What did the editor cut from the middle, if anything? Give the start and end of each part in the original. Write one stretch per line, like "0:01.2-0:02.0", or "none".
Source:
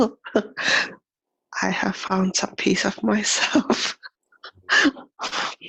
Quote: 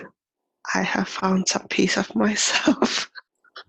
none